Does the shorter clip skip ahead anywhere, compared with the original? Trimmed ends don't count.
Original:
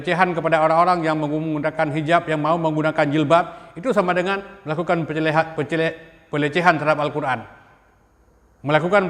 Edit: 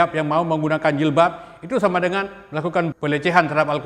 yes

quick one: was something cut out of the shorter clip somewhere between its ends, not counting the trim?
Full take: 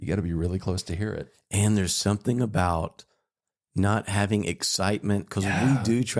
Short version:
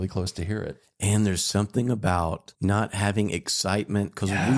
yes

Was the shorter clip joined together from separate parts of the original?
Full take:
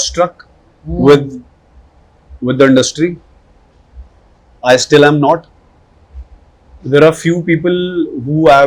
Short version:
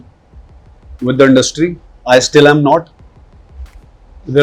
yes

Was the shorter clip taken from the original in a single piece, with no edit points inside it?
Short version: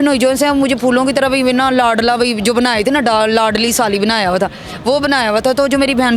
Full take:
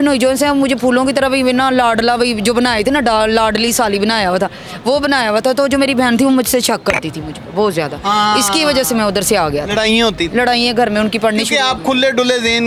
yes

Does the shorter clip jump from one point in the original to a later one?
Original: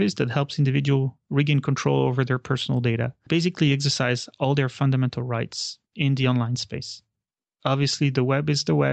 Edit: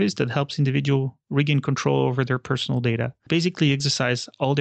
no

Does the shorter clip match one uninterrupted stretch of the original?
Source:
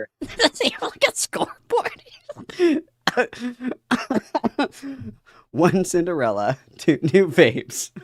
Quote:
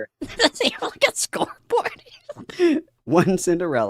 no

